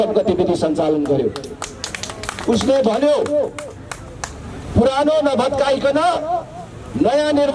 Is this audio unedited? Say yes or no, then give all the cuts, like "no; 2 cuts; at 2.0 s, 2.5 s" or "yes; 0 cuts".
yes; 0 cuts